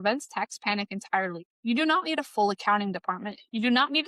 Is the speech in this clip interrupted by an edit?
yes; 1 cut; at 1.5 s

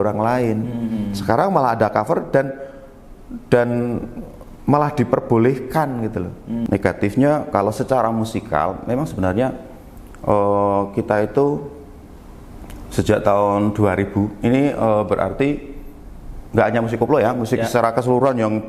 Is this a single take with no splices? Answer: no; 1 cut; at 6.6 s

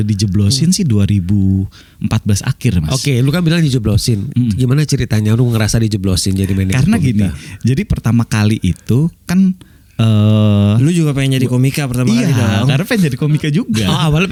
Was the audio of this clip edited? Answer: no; 0 cuts

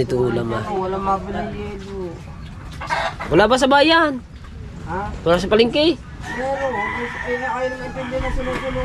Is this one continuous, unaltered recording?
yes; 0 cuts

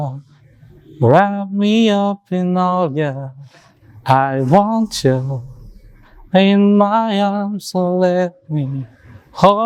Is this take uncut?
yes; 0 cuts

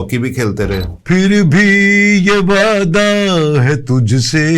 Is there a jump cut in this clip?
yes; 1 cut; at 0.9 s

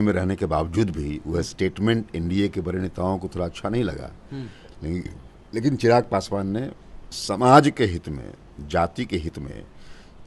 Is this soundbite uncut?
yes; 0 cuts

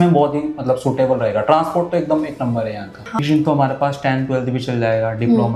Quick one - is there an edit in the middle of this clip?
yes; 1 cut; at 3.2 s

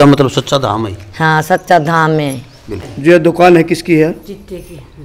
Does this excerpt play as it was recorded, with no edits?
no; 1 cut; at 2.8 s

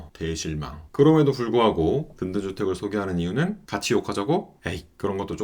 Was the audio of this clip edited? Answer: no; 0 cuts

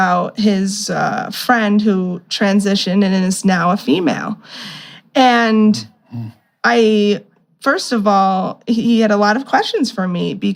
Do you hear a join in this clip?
no; 0 cuts

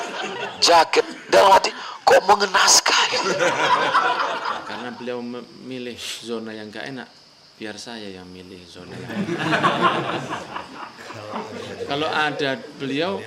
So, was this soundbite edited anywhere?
yes; 1 cut; at 4.7 s

